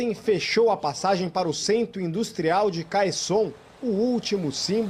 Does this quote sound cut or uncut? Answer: uncut